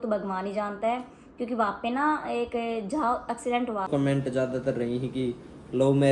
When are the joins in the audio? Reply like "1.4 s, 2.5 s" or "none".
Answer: 3.9 s